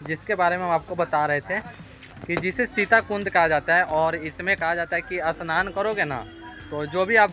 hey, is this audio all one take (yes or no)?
yes